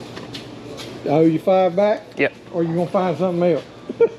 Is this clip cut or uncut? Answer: uncut